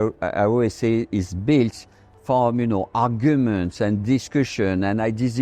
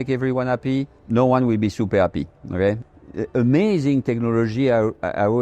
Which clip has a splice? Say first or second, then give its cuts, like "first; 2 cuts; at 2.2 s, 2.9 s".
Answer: second; 2 cuts; at 1.0 s, 2.9 s